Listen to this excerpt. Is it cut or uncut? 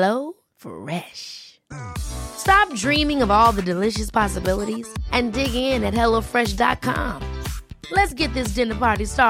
uncut